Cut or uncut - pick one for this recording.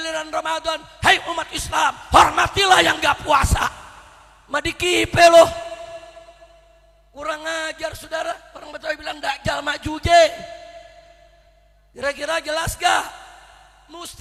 uncut